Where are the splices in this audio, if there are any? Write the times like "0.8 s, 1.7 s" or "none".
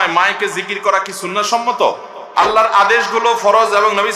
2.1 s